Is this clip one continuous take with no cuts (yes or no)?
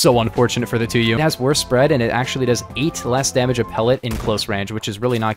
no